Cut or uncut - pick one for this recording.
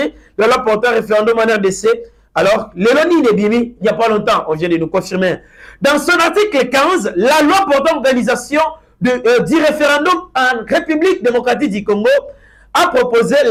uncut